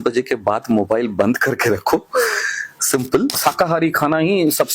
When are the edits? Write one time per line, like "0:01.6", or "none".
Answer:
0:03.4